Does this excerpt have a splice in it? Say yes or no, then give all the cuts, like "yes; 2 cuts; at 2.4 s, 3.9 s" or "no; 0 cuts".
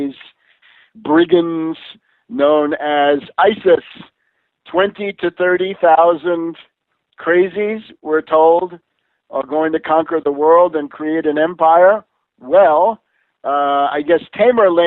yes; 1 cut; at 5.0 s